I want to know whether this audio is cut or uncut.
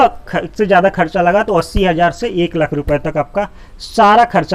uncut